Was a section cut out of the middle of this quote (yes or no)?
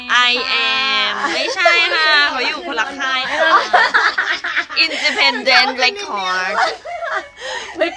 no